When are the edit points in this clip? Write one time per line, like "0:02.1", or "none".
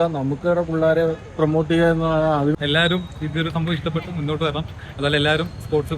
0:02.5

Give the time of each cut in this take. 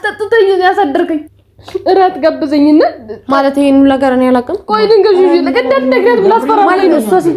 0:01.2

